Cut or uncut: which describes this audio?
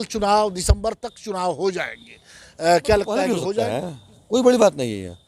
cut